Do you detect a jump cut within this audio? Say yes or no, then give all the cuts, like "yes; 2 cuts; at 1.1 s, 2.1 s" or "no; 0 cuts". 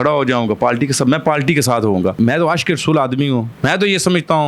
yes; 1 cut; at 2.1 s